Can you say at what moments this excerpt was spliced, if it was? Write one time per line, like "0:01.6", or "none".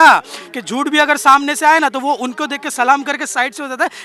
none